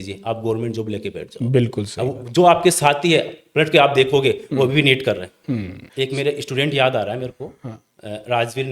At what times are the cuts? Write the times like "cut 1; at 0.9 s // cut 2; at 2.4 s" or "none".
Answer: cut 1; at 5.8 s